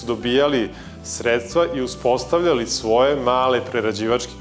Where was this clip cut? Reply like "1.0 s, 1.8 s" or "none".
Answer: none